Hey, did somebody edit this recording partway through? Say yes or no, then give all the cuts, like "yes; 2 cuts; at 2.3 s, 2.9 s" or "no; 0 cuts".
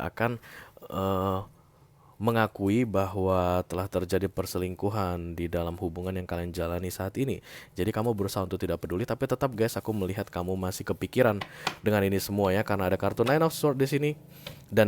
no; 0 cuts